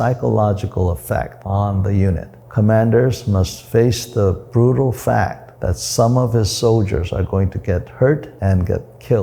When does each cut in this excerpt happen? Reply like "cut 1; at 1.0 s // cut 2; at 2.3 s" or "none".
cut 1; at 1.4 s // cut 2; at 2.3 s // cut 3; at 3.6 s // cut 4; at 8.3 s